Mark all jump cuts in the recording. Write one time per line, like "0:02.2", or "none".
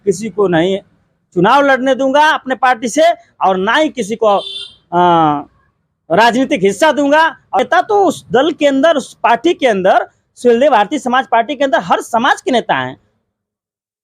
0:07.6